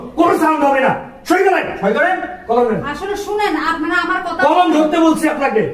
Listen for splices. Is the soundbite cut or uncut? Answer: uncut